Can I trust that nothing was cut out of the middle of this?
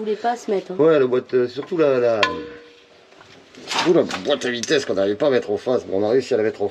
yes; 0 cuts

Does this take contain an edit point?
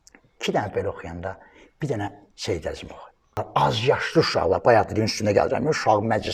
yes; 1 cut; at 3.4 s

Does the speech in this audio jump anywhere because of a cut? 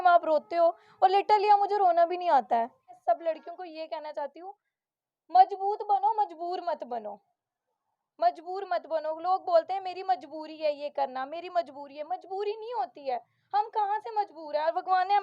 yes; 1 cut; at 2.9 s

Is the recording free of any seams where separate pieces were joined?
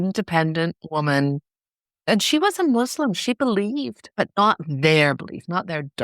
no; 2 cuts; at 2.1 s, 4.0 s

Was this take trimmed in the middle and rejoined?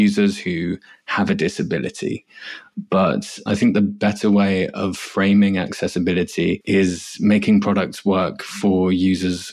yes; 1 cut; at 6.6 s

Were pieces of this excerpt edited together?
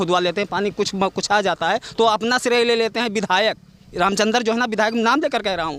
no; 0 cuts

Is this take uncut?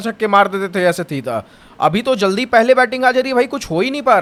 yes; 0 cuts

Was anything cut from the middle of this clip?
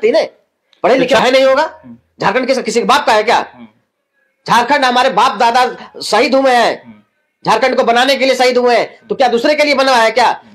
yes; 1 cut; at 1.2 s

